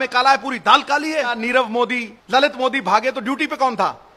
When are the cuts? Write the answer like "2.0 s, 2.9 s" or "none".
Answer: 1.4 s, 2.1 s

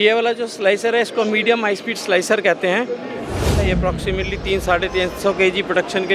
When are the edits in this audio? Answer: 3.6 s

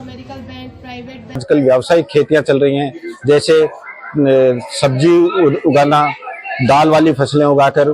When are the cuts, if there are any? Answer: 1.4 s

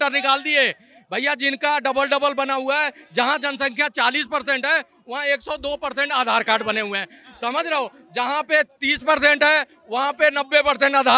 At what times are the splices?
none

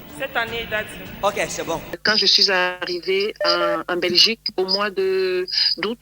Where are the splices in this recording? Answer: 2.0 s

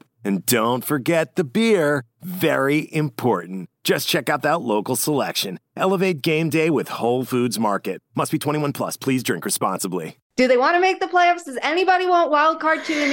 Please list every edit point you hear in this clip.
10.1 s

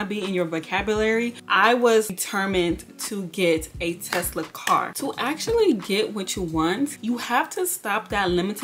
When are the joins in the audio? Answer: 1.4 s, 2.1 s, 5.0 s, 7.0 s

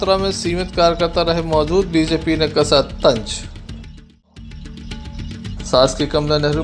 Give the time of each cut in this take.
none

